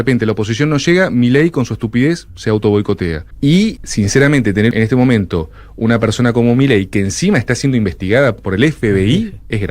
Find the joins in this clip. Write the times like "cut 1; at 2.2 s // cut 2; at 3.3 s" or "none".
cut 1; at 3.3 s // cut 2; at 3.8 s // cut 3; at 4.7 s // cut 4; at 8.4 s